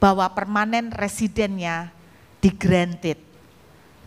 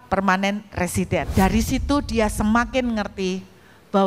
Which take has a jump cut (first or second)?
second